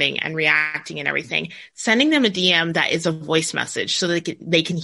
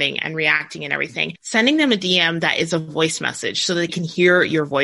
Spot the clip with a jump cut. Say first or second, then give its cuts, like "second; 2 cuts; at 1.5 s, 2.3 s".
second; 2 cuts; at 1.0 s, 3.9 s